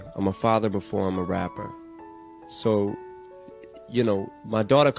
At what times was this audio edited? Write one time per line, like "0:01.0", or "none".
none